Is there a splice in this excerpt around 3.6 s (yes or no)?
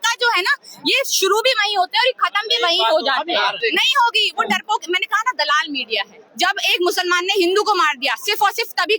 yes